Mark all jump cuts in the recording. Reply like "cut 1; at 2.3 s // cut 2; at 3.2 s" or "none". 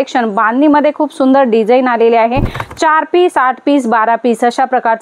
cut 1; at 2.6 s